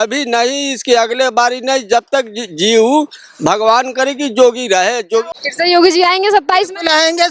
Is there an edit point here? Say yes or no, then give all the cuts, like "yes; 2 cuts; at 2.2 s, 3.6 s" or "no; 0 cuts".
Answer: yes; 1 cut; at 5.3 s